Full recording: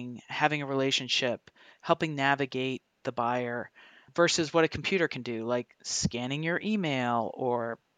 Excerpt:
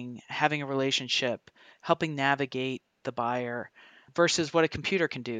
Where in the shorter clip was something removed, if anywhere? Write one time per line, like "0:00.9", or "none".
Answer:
none